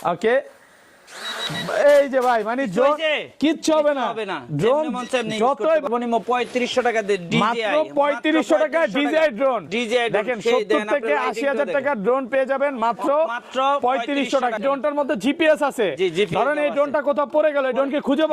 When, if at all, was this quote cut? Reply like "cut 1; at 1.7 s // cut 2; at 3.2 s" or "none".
cut 1; at 5.8 s // cut 2; at 14.6 s